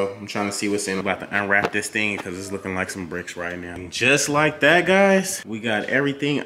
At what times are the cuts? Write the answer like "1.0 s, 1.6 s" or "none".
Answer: 1.0 s, 3.9 s, 5.4 s